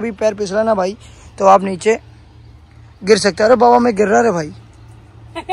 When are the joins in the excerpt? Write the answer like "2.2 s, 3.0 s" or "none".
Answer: none

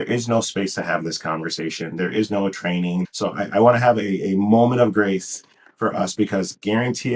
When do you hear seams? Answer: 3.1 s

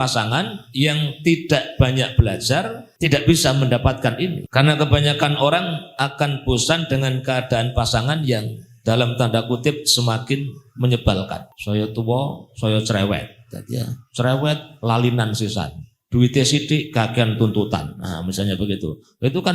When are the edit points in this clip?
2.8 s, 4.4 s, 11.5 s

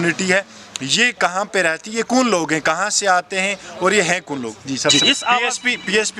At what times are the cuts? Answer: 4.9 s

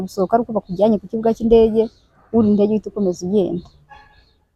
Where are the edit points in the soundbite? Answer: none

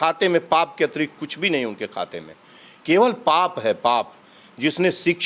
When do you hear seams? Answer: none

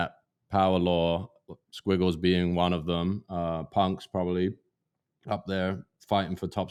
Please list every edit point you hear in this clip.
none

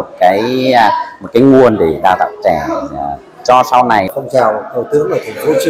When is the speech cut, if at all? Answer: 4.1 s

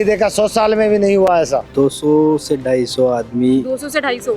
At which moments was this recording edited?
1.7 s

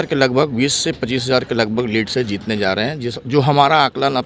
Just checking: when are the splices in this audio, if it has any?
none

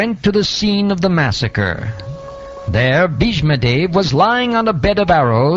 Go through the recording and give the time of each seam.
4.4 s

